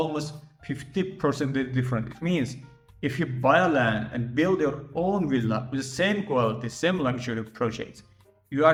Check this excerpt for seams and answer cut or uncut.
uncut